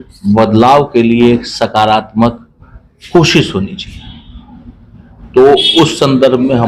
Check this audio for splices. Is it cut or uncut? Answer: uncut